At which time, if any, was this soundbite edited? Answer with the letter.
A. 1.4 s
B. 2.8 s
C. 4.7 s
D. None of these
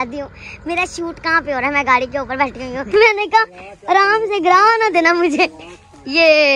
B